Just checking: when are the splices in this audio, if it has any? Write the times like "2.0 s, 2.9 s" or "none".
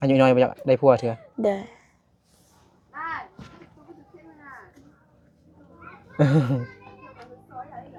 none